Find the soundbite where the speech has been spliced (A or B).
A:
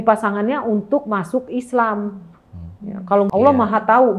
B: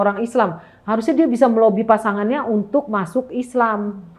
A